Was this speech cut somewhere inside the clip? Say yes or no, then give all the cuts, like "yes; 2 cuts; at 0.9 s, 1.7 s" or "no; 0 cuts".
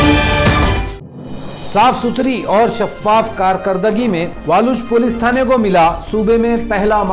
no; 0 cuts